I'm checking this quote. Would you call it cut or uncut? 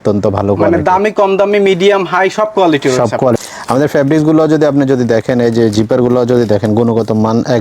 cut